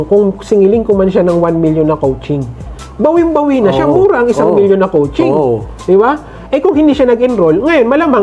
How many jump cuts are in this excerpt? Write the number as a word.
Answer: zero